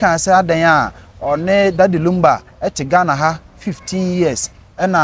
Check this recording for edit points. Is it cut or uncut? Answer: uncut